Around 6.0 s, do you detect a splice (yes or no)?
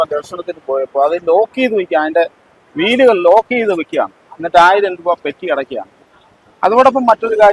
yes